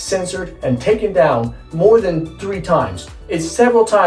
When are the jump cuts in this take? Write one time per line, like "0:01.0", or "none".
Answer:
none